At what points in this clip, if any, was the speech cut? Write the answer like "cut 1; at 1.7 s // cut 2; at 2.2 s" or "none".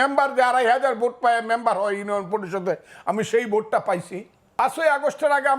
cut 1; at 4.6 s